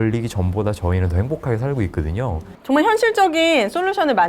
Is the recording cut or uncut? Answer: cut